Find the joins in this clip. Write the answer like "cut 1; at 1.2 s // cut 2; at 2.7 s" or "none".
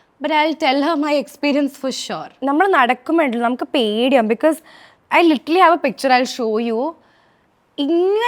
cut 1; at 2.3 s